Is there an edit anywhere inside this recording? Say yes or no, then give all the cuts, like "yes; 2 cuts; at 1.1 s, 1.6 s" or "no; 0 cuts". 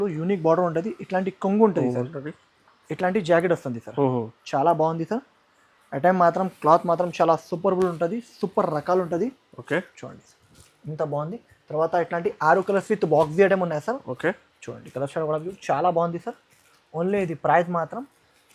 no; 0 cuts